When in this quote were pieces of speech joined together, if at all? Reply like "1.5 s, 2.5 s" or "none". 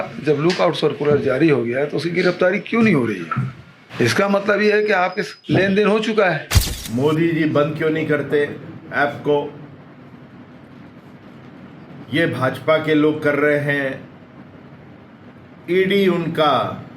6.5 s